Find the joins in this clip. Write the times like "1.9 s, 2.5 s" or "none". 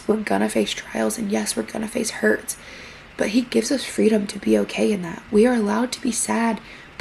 none